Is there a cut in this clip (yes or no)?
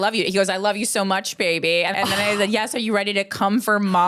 yes